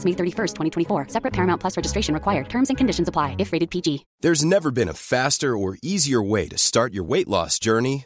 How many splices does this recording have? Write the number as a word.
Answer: one